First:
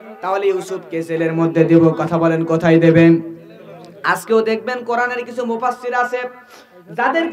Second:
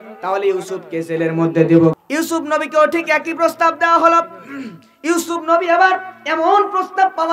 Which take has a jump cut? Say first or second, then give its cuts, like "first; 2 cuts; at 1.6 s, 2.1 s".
second; 1 cut; at 2.0 s